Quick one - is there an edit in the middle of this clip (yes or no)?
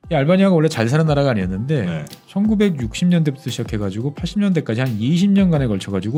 no